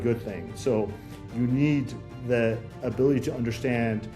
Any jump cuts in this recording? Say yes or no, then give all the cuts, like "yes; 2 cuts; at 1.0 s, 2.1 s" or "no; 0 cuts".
no; 0 cuts